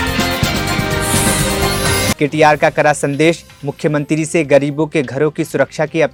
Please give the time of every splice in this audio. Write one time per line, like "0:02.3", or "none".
none